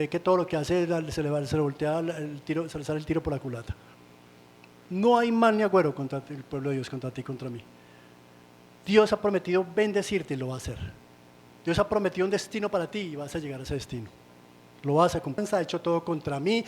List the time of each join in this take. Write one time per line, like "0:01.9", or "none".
0:15.4

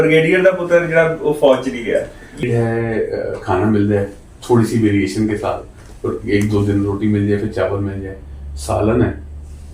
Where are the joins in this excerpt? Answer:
0:02.4

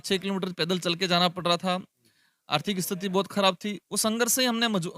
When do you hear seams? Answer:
none

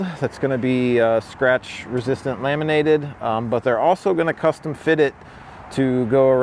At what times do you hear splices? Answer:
none

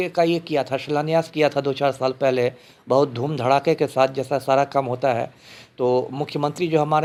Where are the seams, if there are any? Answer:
none

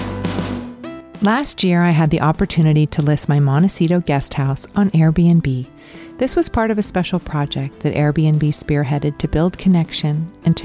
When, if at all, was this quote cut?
0:01.1

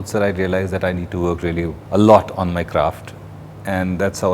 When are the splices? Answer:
none

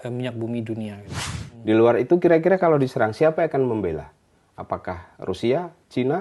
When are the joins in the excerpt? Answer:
0:01.3

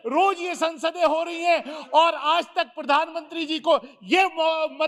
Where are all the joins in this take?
none

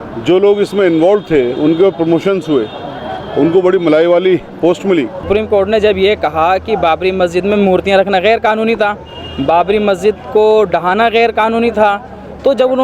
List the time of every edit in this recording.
0:05.3

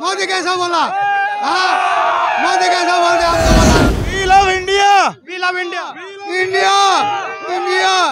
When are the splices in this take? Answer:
0:03.9

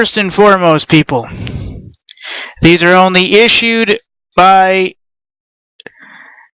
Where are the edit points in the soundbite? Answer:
0:03.0

